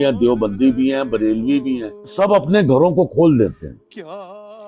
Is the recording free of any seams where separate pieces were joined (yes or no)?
yes